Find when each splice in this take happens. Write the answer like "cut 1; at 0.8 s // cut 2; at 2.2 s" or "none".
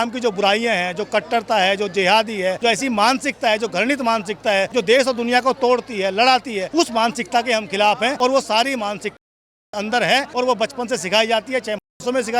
cut 1; at 2.6 s // cut 2; at 4.7 s // cut 3; at 6.6 s // cut 4; at 8.1 s // cut 5; at 10.3 s